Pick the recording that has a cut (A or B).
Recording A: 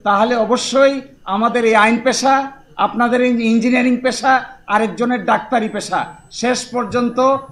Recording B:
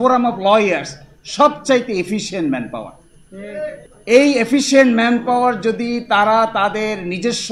B